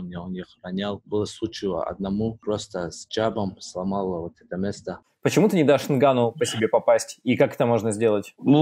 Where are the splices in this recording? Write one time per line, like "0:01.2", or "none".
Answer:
0:05.1

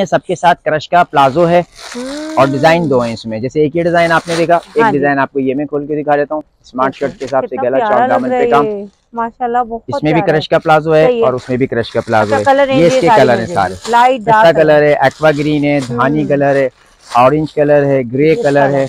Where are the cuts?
none

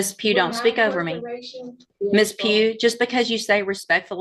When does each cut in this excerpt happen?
0:01.9

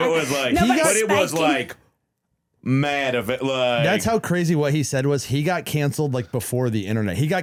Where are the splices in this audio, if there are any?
none

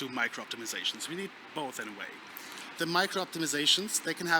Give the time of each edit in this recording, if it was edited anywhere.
none

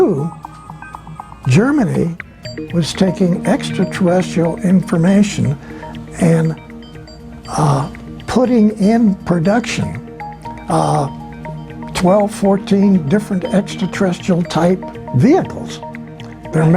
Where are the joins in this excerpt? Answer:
none

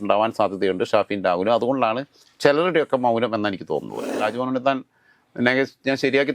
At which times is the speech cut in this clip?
0:04.1

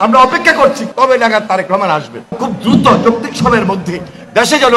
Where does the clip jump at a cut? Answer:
0:00.8
0:02.4

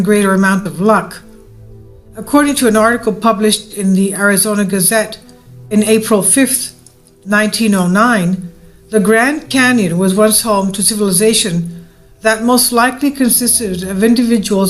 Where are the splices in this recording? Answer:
0:04.4

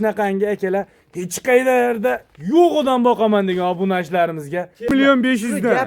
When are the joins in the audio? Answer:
0:04.9

